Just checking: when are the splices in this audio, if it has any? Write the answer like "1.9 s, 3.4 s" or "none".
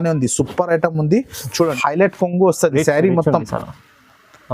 1.7 s